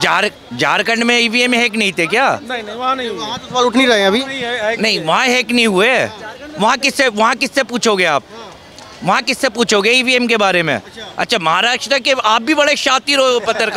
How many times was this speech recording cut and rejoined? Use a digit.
0